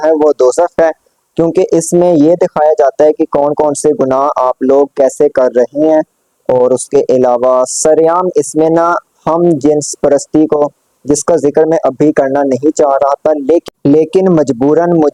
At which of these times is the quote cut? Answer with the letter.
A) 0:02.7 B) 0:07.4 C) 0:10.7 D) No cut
D